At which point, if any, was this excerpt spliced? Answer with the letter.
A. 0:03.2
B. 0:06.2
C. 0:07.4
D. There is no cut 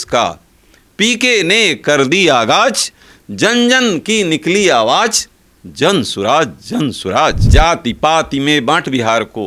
C